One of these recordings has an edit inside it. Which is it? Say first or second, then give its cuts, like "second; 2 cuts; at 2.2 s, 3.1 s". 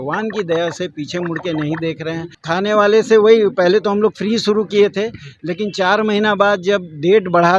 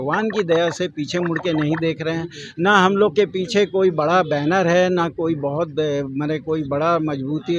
first; 1 cut; at 2.3 s